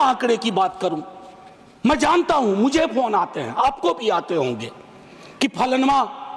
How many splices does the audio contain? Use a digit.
0